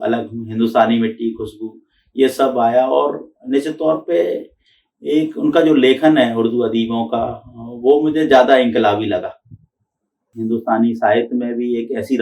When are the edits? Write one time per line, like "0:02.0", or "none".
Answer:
0:10.3